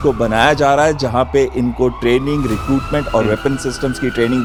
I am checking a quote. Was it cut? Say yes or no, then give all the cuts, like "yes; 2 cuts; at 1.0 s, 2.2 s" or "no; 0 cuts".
no; 0 cuts